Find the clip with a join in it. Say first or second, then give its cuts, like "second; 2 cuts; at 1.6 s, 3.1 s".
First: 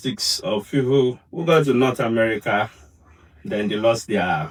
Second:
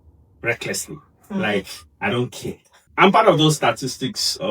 second; 1 cut; at 2.8 s